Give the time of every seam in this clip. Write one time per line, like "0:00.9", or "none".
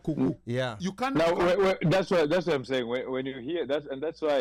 none